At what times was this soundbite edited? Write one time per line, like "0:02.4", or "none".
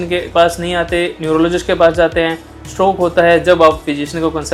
none

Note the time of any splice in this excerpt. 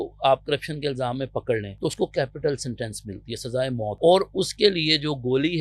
0:01.7
0:04.0

